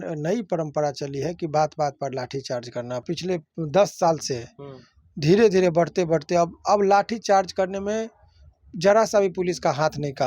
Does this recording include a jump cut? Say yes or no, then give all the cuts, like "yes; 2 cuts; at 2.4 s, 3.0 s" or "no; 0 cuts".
yes; 1 cut; at 3.0 s